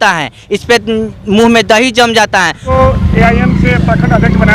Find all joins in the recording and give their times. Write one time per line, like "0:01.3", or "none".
0:02.6